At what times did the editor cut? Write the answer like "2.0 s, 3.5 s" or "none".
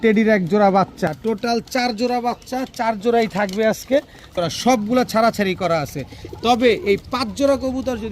1.1 s, 4.3 s